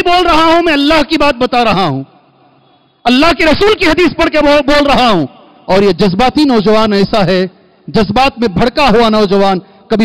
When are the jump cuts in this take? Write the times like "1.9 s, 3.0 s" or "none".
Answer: none